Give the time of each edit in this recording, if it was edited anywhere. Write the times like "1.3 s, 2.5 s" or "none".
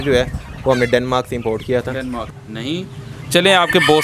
2.3 s